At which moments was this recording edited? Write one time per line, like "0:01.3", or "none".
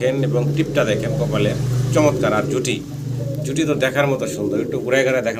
none